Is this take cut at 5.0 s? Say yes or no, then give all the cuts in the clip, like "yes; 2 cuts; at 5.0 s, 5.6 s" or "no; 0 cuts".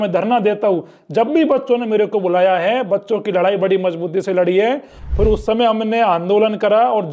yes; 1 cut; at 5.0 s